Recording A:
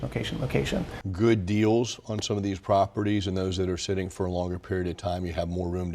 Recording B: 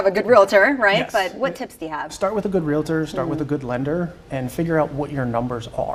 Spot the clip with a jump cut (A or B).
A